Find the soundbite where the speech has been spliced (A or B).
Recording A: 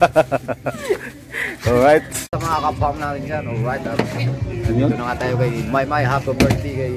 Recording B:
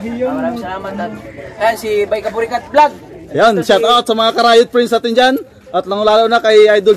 A